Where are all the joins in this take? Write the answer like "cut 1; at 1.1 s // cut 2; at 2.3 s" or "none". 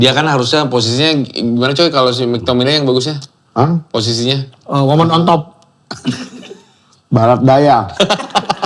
none